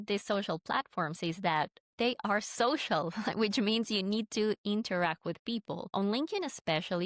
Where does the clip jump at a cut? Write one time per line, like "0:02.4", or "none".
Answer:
0:05.9